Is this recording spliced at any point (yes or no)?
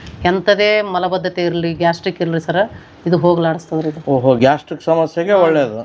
no